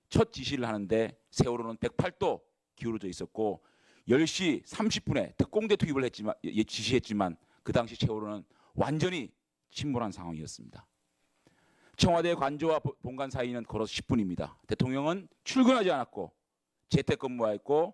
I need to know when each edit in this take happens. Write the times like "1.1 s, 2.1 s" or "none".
none